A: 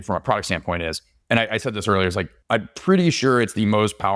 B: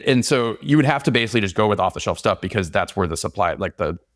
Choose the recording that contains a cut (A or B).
A